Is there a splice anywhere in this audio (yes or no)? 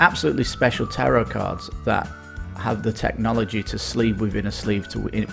no